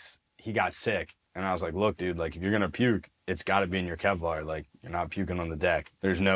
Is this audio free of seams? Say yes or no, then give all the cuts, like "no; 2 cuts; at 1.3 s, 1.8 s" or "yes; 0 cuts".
no; 1 cut; at 1.2 s